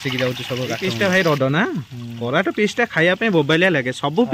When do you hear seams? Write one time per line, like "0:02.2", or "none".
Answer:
0:00.9